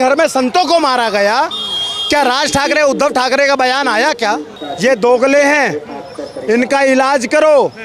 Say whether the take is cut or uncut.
uncut